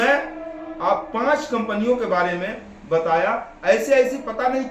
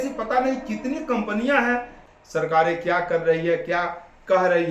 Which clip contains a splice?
second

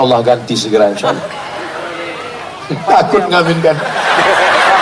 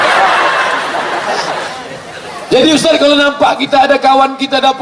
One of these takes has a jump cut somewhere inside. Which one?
second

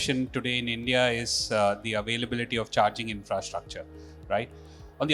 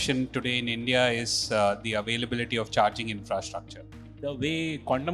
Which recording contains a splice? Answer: second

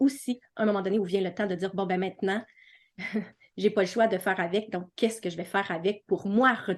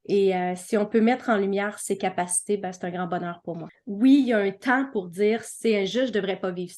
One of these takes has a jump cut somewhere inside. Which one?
second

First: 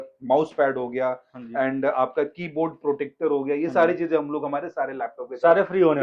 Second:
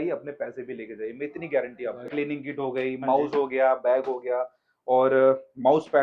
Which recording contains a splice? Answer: second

